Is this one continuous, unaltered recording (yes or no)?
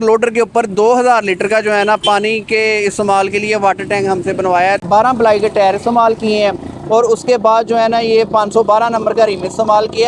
no